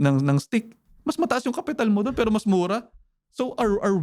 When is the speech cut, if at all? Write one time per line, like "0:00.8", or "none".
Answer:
none